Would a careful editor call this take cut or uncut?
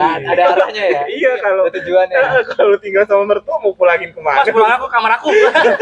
uncut